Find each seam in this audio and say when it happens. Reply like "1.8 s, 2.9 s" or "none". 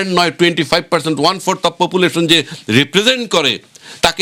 none